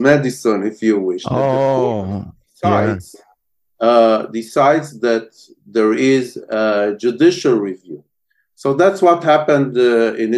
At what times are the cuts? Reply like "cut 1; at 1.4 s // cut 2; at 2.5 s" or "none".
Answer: none